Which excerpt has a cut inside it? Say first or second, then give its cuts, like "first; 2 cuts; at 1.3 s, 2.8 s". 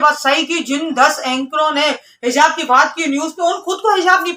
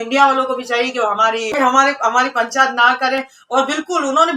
second; 1 cut; at 1.5 s